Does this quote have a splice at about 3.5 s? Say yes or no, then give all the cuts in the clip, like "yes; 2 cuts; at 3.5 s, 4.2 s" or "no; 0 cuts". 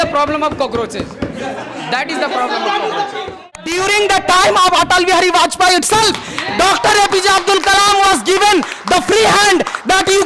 yes; 1 cut; at 3.5 s